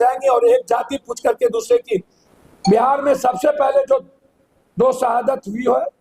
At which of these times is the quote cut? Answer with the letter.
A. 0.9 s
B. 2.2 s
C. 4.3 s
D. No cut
B